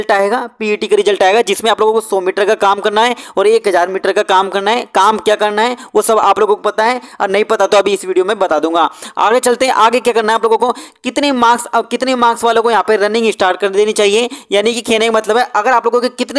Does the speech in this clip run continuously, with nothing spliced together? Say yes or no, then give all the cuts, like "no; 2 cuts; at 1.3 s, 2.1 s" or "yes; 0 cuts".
yes; 0 cuts